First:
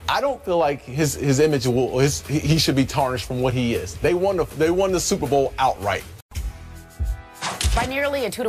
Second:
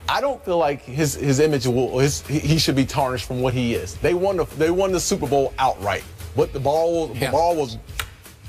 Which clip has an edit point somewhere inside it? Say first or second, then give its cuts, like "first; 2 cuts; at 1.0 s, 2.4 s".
second; 1 cut; at 6.2 s